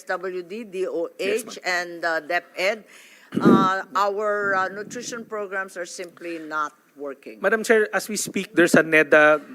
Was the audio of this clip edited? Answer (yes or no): no